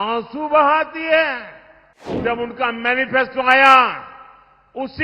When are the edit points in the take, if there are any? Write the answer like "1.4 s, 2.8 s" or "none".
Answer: 2.2 s